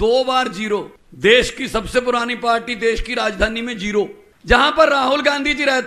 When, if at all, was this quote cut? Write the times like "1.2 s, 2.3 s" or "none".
1.0 s, 4.3 s